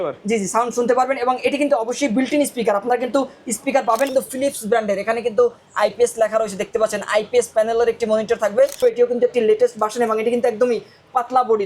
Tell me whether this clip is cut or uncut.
cut